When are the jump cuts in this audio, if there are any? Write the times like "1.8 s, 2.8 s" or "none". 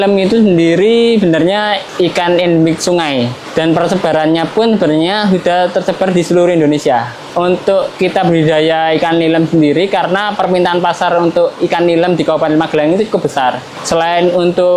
none